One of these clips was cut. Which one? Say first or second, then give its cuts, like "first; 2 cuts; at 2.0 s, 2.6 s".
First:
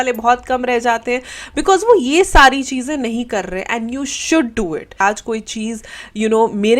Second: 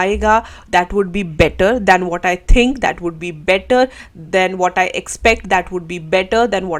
first; 1 cut; at 5.0 s